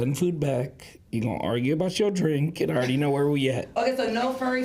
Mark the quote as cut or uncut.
uncut